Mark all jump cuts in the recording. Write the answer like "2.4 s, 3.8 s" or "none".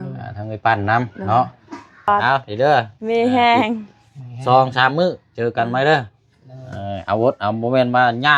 2.1 s